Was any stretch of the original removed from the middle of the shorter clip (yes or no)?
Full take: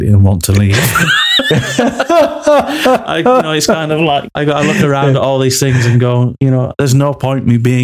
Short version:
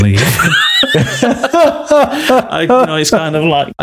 no